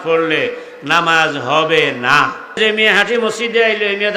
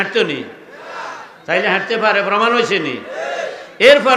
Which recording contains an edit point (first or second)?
first